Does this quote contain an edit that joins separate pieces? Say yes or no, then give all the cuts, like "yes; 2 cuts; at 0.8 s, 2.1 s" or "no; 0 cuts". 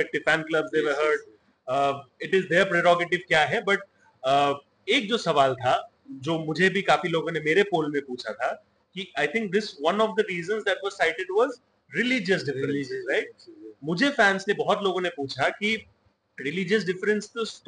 no; 0 cuts